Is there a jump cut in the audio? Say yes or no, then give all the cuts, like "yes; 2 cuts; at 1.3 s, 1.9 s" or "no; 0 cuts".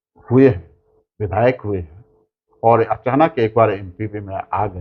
no; 0 cuts